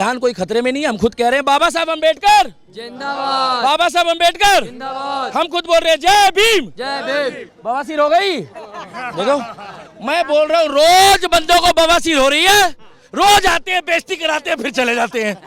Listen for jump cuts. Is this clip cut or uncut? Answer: cut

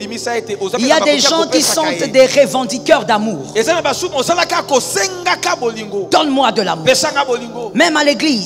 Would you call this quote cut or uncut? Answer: uncut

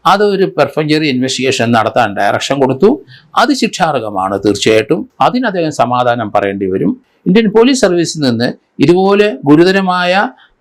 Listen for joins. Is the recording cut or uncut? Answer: cut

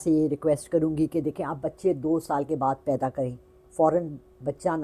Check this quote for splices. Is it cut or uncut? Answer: uncut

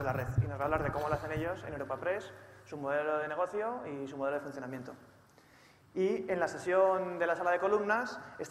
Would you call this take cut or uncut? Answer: cut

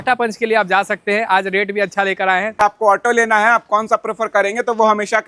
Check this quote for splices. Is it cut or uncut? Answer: cut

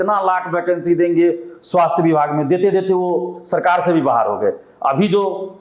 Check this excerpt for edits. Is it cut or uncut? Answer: uncut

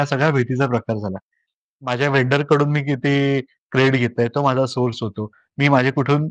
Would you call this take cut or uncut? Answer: cut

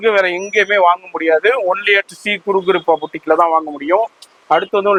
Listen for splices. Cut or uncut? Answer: uncut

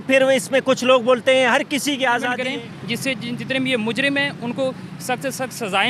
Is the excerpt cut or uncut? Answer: cut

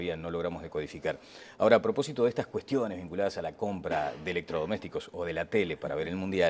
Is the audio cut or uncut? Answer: uncut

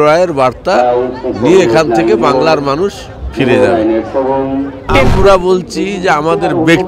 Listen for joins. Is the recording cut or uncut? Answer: cut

